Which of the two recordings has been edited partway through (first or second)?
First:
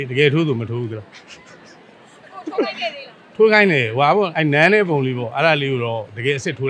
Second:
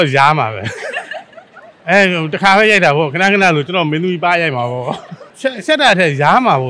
second